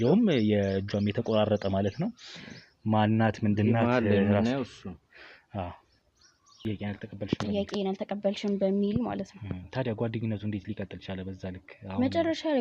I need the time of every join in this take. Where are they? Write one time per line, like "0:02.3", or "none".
0:06.6